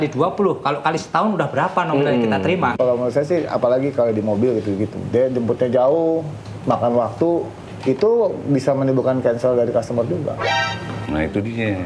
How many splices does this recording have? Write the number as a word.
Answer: one